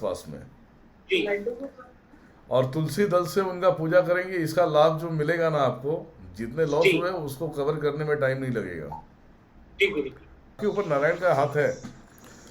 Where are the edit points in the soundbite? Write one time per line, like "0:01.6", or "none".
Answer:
0:10.6